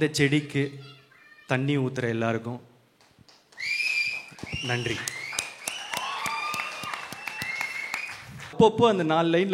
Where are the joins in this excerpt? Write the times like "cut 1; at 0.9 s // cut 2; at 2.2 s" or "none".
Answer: cut 1; at 8.5 s